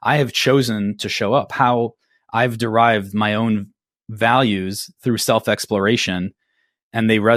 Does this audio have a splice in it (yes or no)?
no